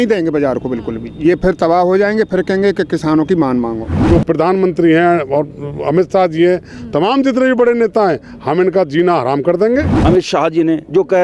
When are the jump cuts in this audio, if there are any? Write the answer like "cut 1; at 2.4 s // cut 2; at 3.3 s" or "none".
cut 1; at 3.9 s // cut 2; at 9.9 s